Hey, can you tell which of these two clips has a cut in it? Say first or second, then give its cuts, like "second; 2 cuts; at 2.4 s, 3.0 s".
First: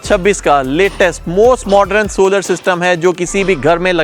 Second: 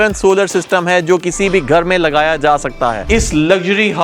second; 1 cut; at 3.0 s